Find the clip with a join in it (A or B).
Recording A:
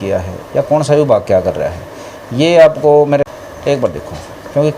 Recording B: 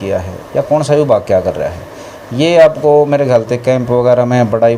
A